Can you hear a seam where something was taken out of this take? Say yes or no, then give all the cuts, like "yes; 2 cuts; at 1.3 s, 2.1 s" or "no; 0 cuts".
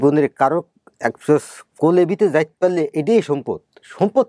no; 0 cuts